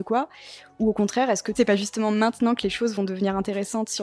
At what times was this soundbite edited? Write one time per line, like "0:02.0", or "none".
0:01.6